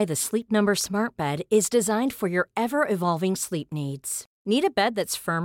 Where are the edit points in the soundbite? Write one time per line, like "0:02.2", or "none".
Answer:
none